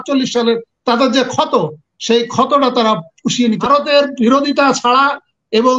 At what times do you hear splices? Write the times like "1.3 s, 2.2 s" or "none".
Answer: 3.7 s